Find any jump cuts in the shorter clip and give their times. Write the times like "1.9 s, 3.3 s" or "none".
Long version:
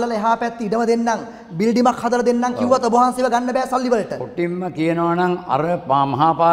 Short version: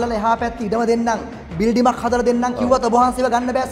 none